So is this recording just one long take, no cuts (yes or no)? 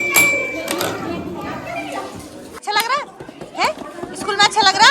no